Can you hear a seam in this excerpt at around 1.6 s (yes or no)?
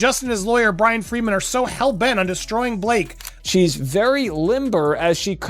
no